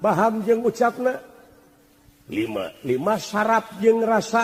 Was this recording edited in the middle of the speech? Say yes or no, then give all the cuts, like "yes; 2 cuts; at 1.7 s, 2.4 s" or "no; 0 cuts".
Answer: no; 0 cuts